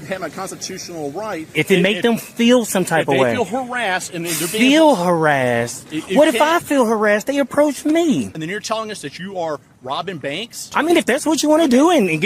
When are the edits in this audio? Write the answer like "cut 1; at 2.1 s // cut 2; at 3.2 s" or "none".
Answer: cut 1; at 1.5 s // cut 2; at 8.3 s // cut 3; at 10.6 s